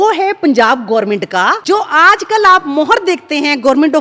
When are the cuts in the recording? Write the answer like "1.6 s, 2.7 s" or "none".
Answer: 1.6 s